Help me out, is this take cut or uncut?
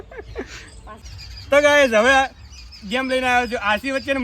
cut